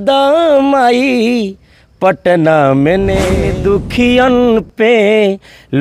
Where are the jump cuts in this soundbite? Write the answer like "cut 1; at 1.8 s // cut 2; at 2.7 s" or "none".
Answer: cut 1; at 3.4 s